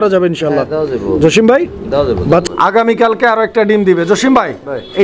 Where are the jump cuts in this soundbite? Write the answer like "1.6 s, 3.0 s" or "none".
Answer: 2.4 s

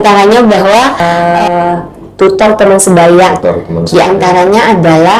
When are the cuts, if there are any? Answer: 1.0 s

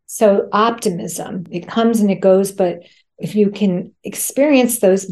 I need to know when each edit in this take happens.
1.5 s

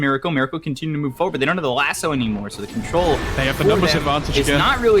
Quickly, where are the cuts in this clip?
none

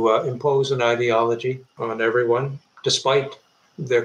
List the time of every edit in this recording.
none

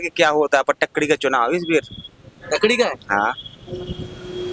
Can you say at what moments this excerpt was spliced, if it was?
none

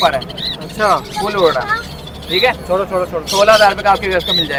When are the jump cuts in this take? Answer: none

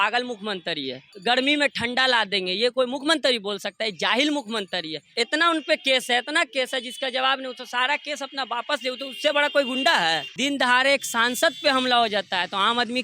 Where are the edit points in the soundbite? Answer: 1.1 s, 5.0 s, 10.3 s

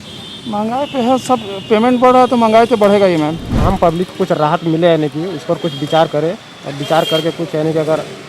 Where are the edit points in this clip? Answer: 3.5 s

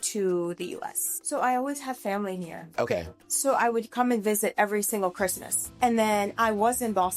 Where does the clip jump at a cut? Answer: 1.1 s, 5.5 s

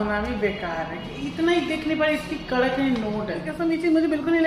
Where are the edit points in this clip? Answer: 3.5 s

